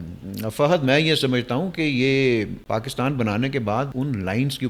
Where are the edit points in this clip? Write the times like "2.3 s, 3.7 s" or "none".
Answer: 2.6 s, 3.9 s